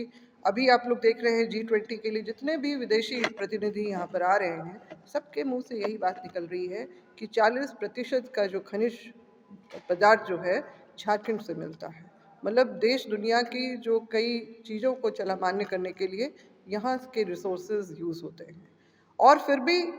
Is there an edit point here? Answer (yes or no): no